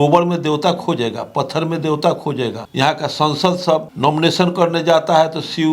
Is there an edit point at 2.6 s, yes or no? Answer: yes